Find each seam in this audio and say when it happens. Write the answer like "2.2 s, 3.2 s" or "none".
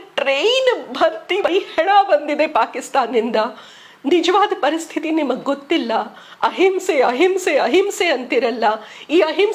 1.5 s